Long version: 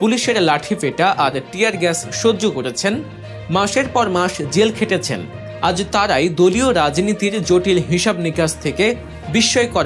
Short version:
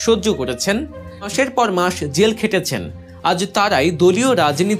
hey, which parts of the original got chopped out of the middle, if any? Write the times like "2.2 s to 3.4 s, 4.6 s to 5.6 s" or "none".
3.5 s to 3.7 s